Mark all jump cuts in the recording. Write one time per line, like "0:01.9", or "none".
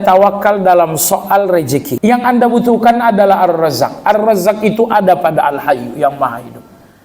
0:01.9